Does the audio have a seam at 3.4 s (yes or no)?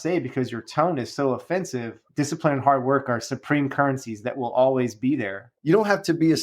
no